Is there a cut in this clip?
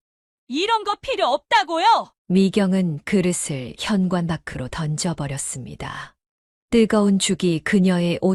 no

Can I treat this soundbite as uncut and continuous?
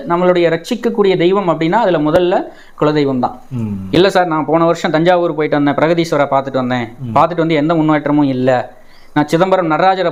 yes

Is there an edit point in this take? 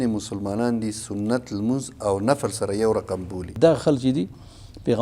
yes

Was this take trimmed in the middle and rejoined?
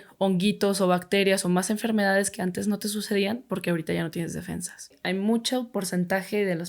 yes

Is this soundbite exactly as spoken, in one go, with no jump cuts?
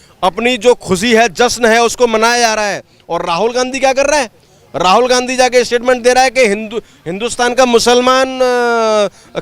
yes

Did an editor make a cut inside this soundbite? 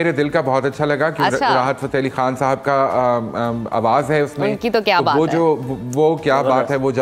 no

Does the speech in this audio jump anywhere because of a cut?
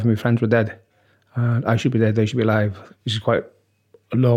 yes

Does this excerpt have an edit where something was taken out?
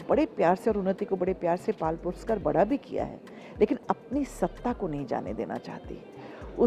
no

